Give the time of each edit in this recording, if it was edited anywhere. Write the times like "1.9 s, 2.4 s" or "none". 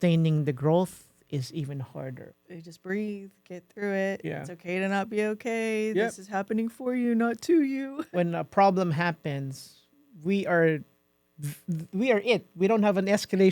2.3 s, 7.9 s